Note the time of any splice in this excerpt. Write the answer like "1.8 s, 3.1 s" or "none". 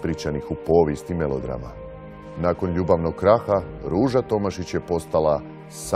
none